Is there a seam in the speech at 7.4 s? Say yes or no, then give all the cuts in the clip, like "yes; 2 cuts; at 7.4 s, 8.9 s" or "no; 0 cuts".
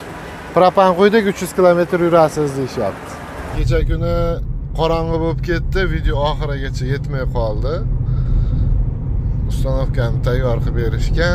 no; 1 cut; at 3.6 s